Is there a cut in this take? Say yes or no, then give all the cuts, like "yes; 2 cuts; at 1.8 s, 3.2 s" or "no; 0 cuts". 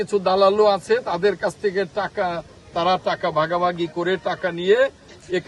no; 0 cuts